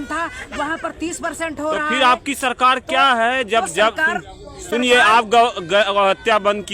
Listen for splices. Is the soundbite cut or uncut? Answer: uncut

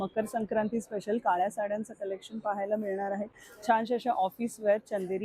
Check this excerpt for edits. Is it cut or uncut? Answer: uncut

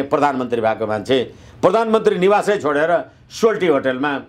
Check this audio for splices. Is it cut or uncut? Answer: uncut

